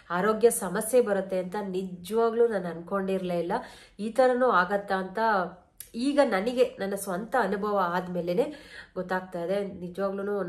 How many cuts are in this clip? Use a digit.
0